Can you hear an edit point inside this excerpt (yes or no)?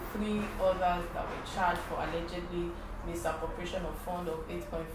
no